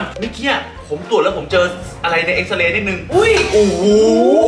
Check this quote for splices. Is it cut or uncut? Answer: uncut